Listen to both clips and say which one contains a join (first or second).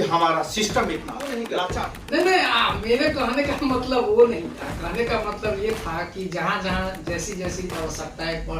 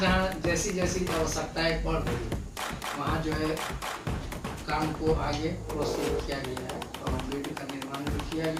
first